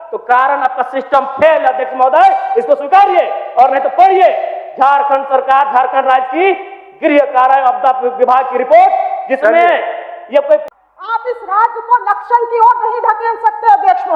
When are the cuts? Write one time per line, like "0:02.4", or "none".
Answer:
0:10.7

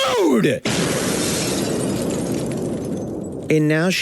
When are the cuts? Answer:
none

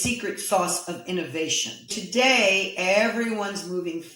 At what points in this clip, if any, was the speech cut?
0:02.0

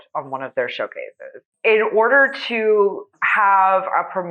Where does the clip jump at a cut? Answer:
0:01.4

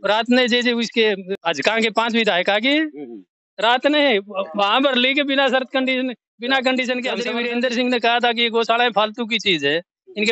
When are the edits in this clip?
0:01.3
0:07.3

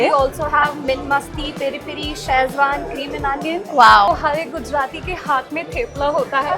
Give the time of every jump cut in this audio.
0:04.1

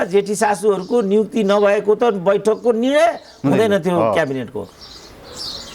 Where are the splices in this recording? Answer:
none

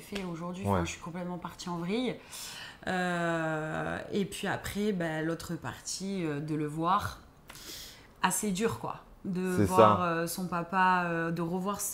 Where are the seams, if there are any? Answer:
none

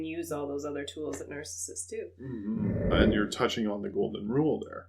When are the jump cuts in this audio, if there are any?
0:02.9

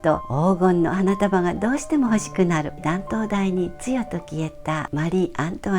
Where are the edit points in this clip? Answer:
0:02.8
0:04.9

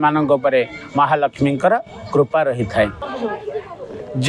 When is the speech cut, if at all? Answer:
0:03.1

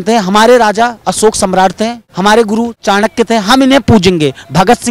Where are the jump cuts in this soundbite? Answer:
0:02.0
0:02.8

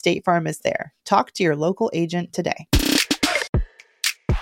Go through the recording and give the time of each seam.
0:03.5

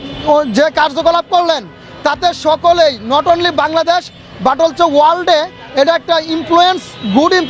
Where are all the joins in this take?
none

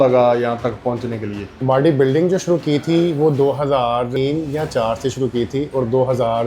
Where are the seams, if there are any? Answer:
0:01.6
0:04.1

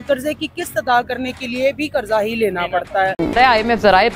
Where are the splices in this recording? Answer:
0:03.2

